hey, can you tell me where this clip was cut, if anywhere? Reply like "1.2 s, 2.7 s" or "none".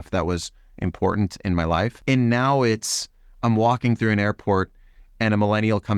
2.0 s